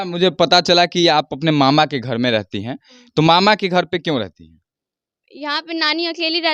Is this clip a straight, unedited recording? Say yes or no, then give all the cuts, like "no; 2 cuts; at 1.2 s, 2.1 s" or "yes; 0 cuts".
yes; 0 cuts